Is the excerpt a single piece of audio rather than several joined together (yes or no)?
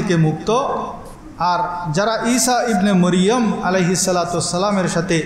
yes